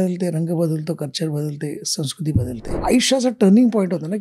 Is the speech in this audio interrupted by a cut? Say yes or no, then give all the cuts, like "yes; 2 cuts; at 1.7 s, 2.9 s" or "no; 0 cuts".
yes; 1 cut; at 2.7 s